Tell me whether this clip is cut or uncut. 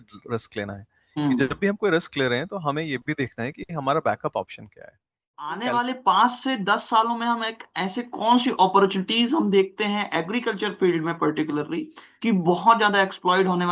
cut